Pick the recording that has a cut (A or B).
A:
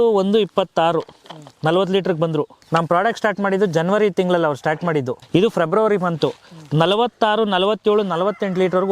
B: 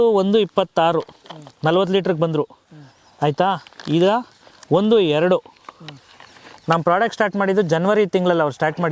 A